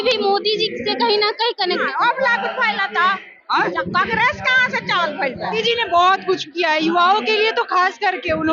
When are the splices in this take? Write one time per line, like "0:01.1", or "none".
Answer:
0:01.8
0:05.6